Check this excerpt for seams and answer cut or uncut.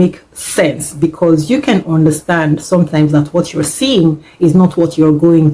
uncut